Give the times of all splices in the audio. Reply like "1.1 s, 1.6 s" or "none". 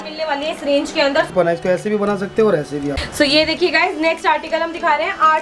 1.3 s, 3.0 s